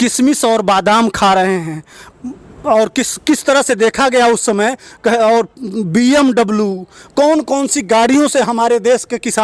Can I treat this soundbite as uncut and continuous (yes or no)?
yes